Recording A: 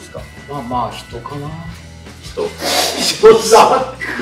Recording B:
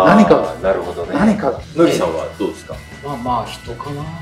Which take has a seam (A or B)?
B